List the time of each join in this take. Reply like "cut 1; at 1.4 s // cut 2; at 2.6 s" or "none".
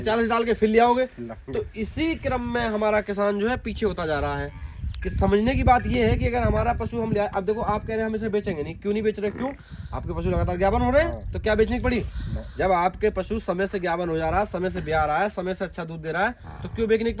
none